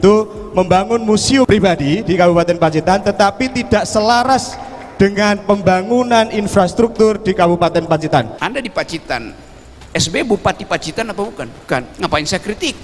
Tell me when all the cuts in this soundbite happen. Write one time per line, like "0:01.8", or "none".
0:01.5
0:08.4
0:11.8